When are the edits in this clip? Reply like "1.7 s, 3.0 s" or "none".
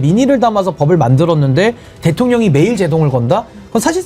none